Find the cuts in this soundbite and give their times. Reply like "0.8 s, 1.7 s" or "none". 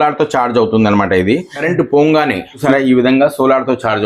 2.6 s